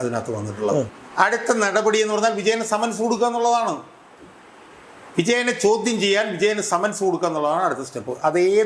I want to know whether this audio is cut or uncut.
cut